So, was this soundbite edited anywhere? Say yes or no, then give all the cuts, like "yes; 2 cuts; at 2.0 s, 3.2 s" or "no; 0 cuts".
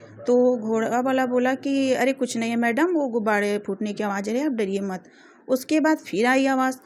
no; 0 cuts